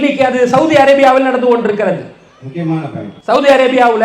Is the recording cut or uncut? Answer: cut